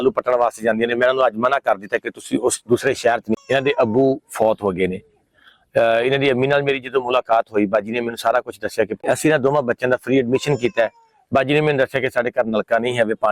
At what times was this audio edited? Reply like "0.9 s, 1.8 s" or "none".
3.4 s, 9.0 s